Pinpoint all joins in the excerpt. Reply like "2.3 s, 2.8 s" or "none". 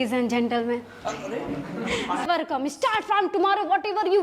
2.3 s